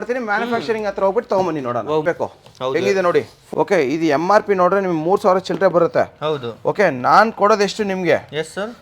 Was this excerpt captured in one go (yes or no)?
no